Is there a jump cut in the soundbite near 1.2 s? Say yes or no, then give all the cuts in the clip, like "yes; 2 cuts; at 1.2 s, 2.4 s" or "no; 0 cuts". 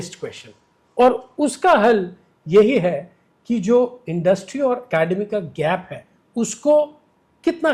no; 0 cuts